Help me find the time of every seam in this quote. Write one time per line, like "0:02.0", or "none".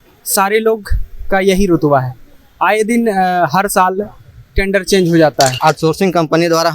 0:05.6